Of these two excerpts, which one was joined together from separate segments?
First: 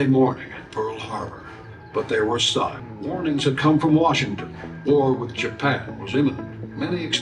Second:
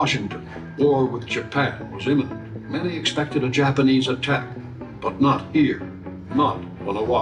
first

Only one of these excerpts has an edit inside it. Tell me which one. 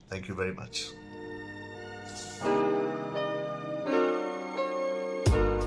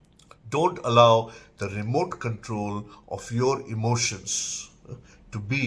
first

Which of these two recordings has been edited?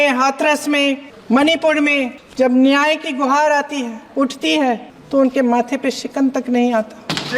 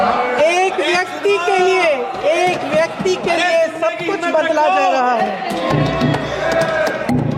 first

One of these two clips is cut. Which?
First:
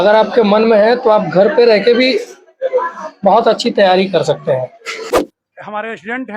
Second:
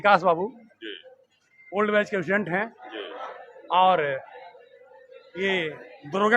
first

